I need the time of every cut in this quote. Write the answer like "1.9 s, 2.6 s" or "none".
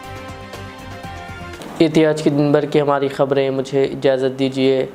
none